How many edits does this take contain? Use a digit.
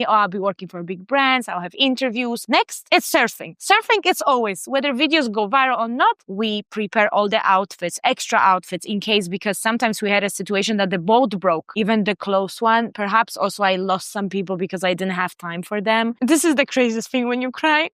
4